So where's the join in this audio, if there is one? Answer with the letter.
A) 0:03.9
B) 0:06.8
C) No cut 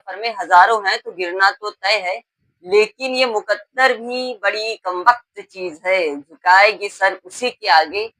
C